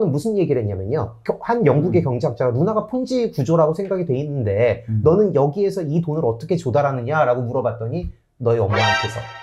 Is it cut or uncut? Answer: uncut